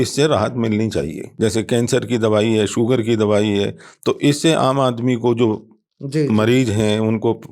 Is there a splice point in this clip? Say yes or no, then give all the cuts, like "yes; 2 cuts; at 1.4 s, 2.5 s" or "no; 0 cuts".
yes; 1 cut; at 1.2 s